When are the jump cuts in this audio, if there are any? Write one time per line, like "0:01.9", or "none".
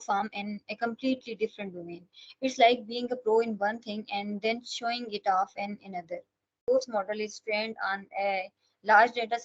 0:06.6